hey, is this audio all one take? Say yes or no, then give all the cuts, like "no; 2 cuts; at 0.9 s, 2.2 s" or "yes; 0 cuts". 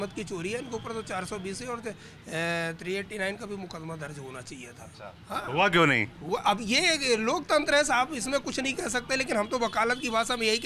yes; 0 cuts